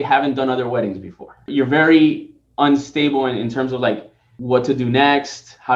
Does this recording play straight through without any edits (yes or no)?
no